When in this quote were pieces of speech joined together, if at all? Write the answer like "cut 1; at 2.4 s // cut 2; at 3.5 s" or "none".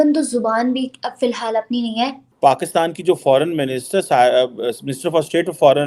cut 1; at 2.2 s